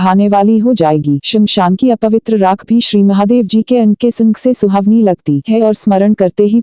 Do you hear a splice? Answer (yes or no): no